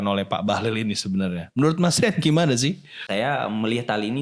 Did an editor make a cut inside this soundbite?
yes; 1 cut; at 3.0 s

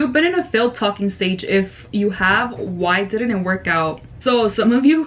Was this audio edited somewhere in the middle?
no; 0 cuts

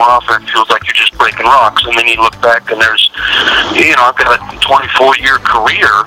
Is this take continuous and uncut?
yes; 0 cuts

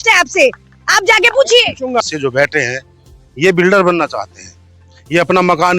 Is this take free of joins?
no; 1 cut; at 2.0 s

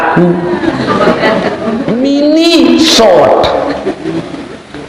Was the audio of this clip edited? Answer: yes; 1 cut; at 1.8 s

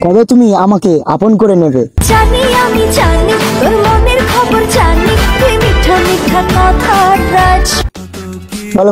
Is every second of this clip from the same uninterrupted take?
yes; 0 cuts

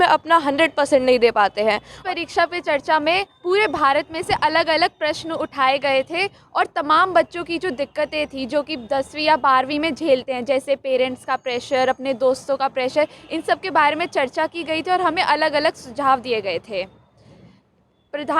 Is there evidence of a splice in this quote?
yes; 1 cut; at 1.9 s

